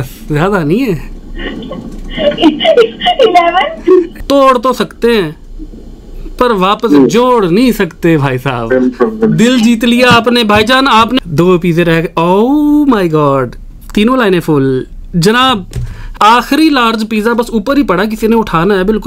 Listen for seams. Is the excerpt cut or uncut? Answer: cut